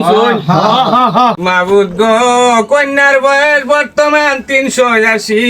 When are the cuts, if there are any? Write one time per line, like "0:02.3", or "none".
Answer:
0:01.4